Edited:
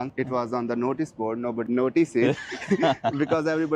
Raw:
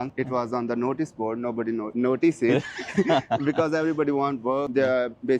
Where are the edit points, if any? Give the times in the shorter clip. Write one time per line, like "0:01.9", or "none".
0:01.6

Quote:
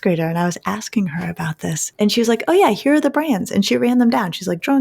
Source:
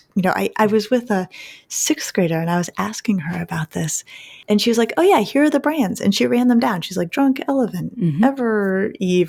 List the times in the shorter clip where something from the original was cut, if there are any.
0:01.8

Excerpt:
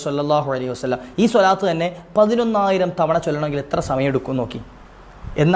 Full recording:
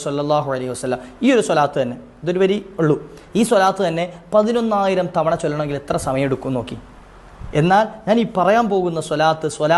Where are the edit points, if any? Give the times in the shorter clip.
0:01.1

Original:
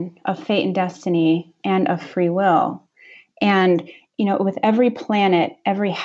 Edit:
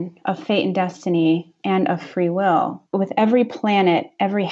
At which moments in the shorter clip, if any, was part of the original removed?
0:02.9

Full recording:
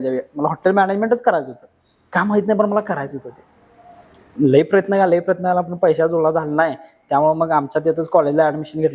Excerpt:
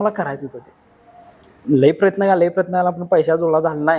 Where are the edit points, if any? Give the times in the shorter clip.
none

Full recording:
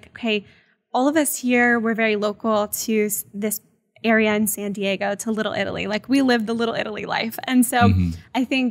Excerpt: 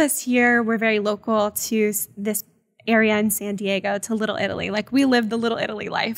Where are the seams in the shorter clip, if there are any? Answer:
none

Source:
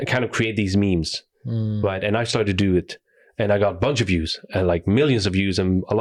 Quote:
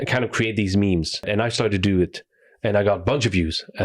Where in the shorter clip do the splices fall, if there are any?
0:01.2

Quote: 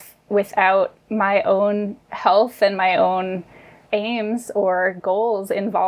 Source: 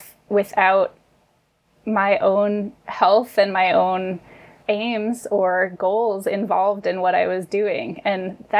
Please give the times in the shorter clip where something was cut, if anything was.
0:01.0

